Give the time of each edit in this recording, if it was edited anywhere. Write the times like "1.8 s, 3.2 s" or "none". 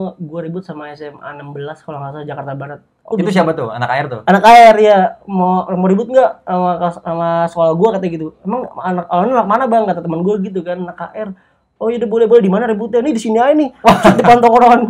3.1 s